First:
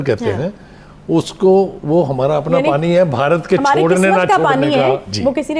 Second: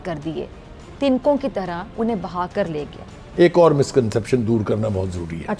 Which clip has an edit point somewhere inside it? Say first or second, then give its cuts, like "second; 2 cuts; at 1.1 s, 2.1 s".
second; 1 cut; at 3.2 s